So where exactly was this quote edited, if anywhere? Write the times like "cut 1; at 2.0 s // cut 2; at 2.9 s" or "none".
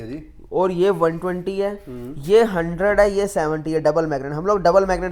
none